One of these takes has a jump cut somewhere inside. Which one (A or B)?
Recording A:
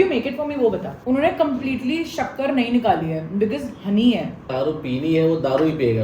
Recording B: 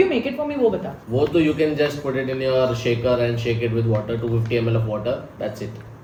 A